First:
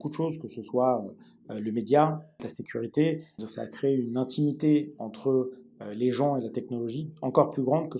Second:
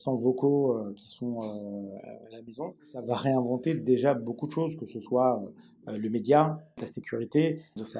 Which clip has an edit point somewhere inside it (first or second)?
second